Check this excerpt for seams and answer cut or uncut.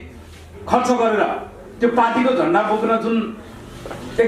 uncut